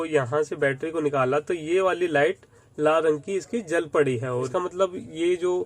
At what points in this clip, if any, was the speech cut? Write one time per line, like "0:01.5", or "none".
0:04.5